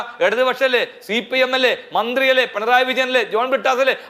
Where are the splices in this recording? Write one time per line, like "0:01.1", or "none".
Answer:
none